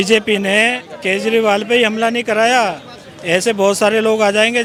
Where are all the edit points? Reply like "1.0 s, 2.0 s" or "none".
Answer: none